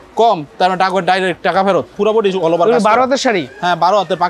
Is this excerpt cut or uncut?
cut